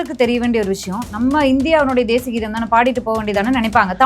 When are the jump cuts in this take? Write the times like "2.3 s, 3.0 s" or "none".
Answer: 1.0 s

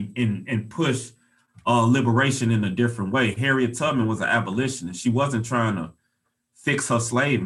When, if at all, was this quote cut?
none

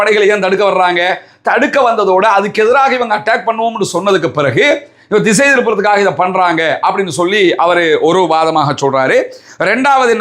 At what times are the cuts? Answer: none

